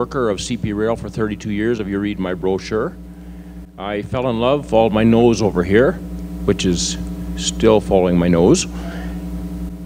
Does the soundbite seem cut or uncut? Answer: uncut